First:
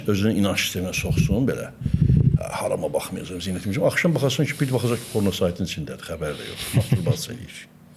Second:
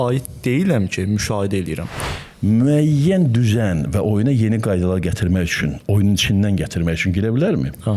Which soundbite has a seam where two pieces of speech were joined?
second; 1 cut; at 1.9 s

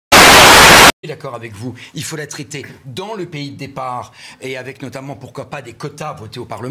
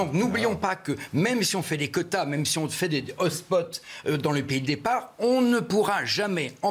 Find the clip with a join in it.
first; 1 cut; at 1.0 s

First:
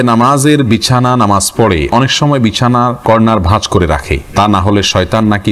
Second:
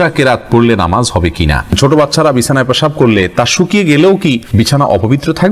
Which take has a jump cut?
second; 2 cuts; at 1.7 s, 4.4 s

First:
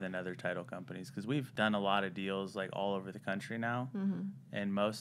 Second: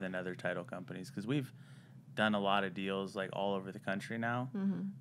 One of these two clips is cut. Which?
first; 1 cut; at 1.5 s

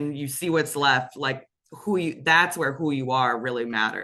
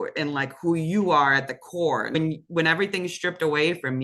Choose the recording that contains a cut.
second; 1 cut; at 2.1 s

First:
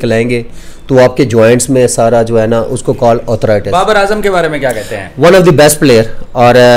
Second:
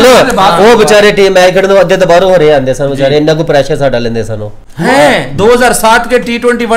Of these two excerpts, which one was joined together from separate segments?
first; 1 cut; at 3.7 s

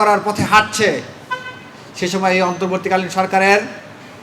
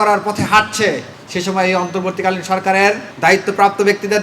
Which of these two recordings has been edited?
second; 2 cuts; at 1.1 s, 3.1 s

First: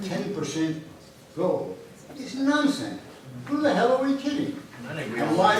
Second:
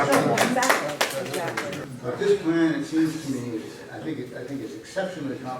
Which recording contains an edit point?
second; 1 cut; at 1.8 s

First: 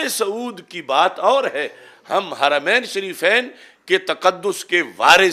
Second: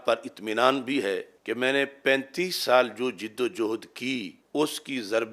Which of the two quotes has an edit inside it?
second; 2 cuts; at 1.3 s, 4.4 s

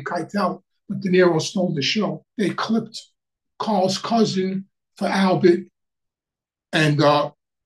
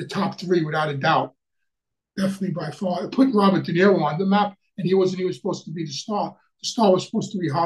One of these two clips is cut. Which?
first; 1 cut; at 2.2 s

